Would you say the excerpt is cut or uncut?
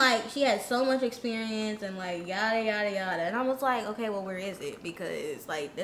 uncut